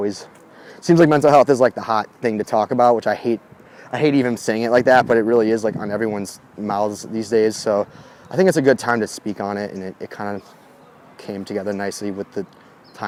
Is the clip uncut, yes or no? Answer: yes